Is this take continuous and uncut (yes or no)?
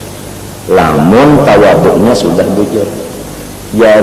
yes